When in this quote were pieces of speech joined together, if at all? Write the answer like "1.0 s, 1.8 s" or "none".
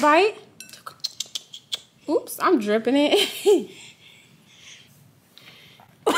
4.9 s